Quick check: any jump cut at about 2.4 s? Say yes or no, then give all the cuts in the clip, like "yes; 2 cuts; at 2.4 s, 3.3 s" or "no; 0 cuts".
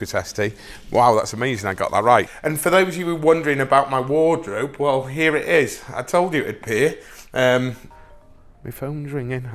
yes; 2 cuts; at 2.4 s, 7.9 s